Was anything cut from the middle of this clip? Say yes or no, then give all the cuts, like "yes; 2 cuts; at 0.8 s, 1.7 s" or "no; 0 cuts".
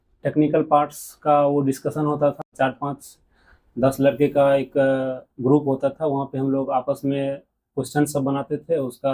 yes; 1 cut; at 2.5 s